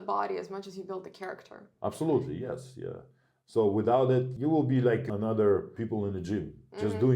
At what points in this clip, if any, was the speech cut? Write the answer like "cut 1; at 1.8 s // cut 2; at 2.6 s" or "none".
cut 1; at 4.3 s // cut 2; at 5.1 s // cut 3; at 5.7 s